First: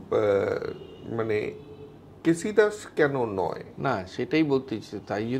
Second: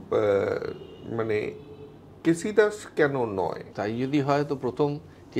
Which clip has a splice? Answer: second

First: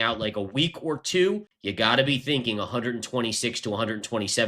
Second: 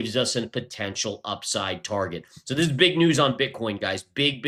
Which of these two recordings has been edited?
first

